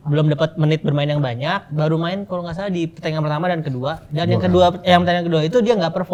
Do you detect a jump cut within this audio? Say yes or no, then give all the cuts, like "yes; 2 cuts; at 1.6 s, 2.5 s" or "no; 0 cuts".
no; 0 cuts